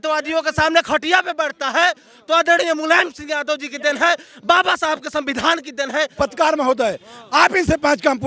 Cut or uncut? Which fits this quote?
cut